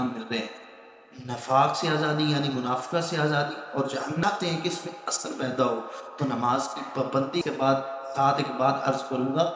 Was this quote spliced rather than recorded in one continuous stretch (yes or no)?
yes